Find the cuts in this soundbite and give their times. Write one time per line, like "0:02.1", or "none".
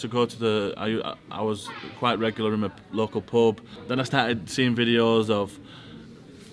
0:03.7